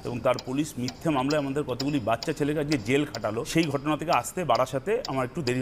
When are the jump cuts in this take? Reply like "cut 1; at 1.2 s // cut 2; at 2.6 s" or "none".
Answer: cut 1; at 3.4 s